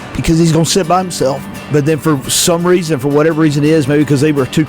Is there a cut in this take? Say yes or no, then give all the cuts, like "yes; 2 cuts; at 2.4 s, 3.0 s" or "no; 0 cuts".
yes; 1 cut; at 1.5 s